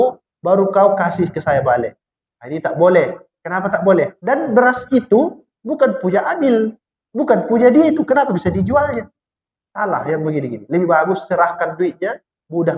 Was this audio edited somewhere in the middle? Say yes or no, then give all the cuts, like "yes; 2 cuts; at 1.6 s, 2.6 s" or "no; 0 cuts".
yes; 1 cut; at 4.2 s